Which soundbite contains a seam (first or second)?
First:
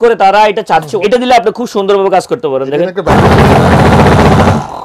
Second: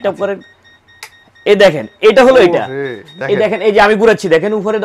first